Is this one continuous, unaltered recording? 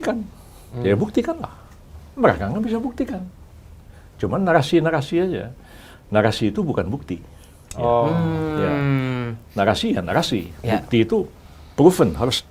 yes; 0 cuts

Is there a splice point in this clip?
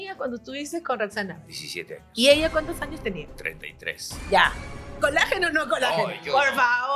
no; 0 cuts

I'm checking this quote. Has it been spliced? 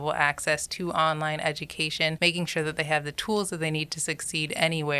yes; 2 cuts; at 2.2 s, 3.2 s

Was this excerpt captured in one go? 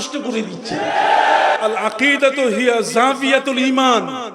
no; 1 cut; at 1.6 s

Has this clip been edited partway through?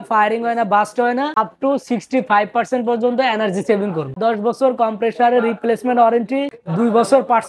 yes; 3 cuts; at 1.4 s, 4.2 s, 6.6 s

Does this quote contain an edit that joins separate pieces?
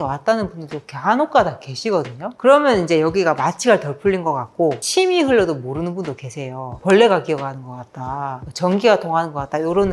no; 0 cuts

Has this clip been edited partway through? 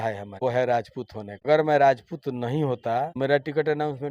yes; 1 cut; at 1.3 s

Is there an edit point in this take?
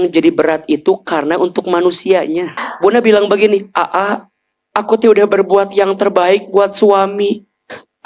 yes; 1 cut; at 2.6 s

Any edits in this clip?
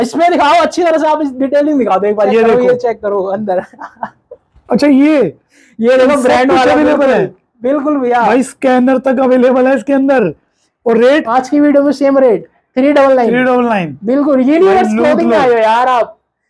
yes; 2 cuts; at 2.3 s, 11.3 s

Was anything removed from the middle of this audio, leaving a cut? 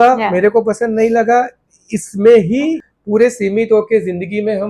yes; 1 cut; at 2.8 s

